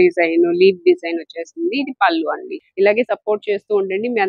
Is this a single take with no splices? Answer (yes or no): no